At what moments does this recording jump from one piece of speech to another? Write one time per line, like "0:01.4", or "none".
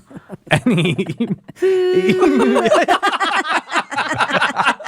0:01.5